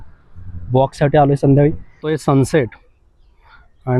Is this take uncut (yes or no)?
no